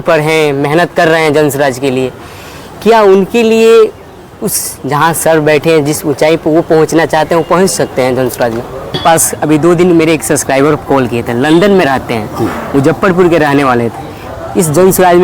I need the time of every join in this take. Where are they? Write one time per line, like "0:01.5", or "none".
0:09.0